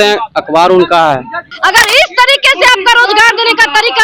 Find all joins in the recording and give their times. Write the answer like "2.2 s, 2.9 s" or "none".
1.4 s